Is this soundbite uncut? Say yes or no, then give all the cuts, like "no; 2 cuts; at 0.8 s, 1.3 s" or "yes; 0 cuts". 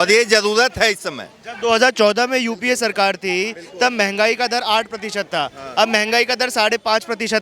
yes; 0 cuts